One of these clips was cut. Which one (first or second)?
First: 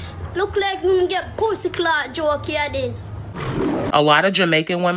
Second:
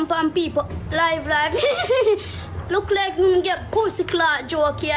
first